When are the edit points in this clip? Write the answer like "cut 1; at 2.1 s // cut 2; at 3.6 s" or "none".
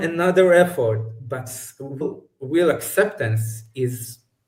cut 1; at 2.1 s